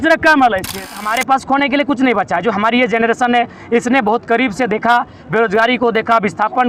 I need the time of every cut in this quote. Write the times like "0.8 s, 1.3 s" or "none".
0.9 s